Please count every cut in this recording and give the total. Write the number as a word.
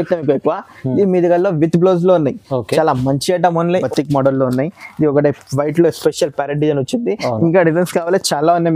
one